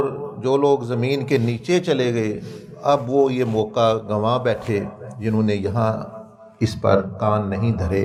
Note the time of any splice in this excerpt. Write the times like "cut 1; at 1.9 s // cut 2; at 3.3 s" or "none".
none

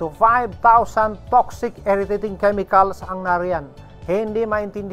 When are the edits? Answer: none

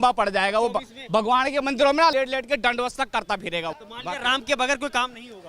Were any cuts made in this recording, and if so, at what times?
cut 1; at 2.1 s // cut 2; at 3.8 s

